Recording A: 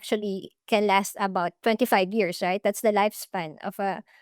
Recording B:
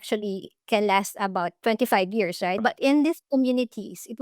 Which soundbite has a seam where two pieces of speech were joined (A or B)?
B